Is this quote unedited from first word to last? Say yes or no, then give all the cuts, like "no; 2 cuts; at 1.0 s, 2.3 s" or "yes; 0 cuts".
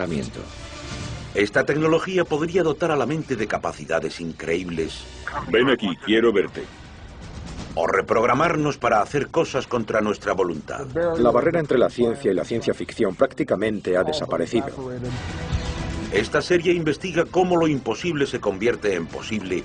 no; 1 cut; at 16.2 s